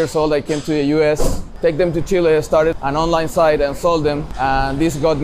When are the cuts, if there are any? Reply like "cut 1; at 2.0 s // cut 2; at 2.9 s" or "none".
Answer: cut 1; at 1.4 s // cut 2; at 2.7 s // cut 3; at 4.3 s